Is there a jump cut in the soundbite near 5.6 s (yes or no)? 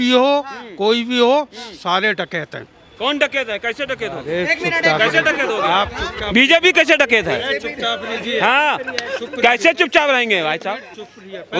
no